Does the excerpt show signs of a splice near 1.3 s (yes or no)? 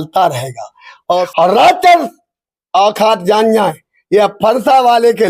yes